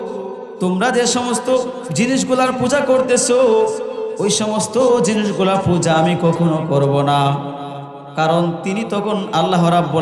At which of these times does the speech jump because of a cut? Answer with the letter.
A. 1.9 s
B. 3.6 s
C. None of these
A